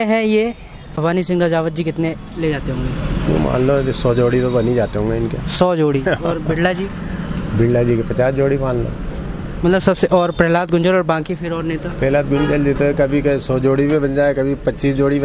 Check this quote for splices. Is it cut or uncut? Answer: cut